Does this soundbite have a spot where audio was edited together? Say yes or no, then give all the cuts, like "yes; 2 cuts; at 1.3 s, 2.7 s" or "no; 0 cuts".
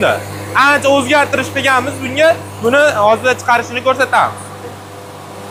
no; 0 cuts